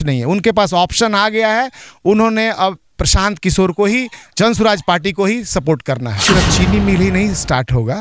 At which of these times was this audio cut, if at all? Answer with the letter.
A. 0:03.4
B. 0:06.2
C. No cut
B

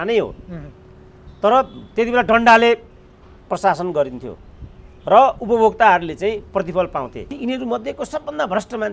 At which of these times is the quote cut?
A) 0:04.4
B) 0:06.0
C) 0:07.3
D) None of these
C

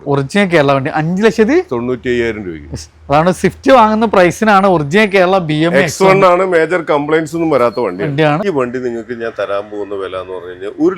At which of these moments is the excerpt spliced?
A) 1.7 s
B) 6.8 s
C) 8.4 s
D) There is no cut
C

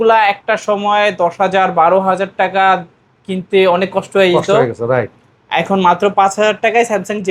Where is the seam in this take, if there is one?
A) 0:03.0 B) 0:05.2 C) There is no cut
C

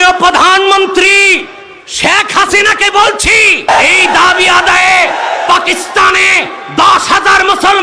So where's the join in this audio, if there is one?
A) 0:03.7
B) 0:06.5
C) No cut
A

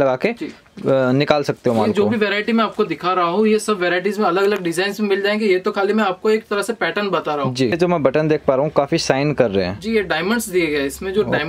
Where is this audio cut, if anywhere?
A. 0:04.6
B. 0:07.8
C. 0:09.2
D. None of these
B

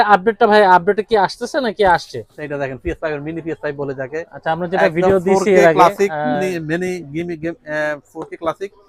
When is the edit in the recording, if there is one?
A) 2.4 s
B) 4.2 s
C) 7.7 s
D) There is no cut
A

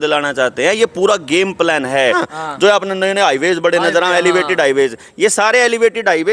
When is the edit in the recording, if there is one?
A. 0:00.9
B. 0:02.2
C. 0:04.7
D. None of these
B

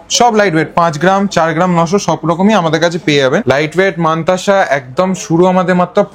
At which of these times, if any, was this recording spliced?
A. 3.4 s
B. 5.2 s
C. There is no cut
A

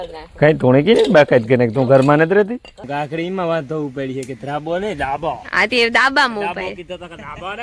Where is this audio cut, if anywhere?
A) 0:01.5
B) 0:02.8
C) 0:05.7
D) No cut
B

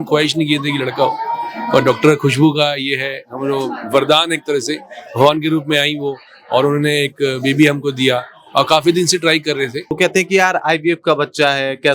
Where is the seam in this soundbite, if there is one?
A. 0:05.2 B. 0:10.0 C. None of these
B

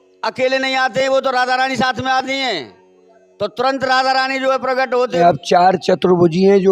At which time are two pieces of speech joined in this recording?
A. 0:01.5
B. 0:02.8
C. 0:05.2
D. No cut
C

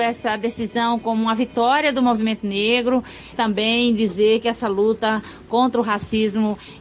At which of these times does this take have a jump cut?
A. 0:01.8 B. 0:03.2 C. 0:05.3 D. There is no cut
B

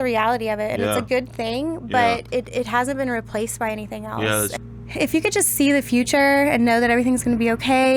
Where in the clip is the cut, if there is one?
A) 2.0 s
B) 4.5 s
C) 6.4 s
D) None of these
B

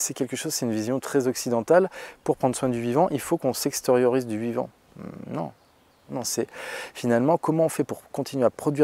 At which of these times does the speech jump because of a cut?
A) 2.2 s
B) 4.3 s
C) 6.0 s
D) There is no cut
C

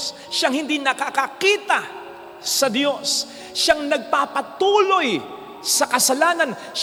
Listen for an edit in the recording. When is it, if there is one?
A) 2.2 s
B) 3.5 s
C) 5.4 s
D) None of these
D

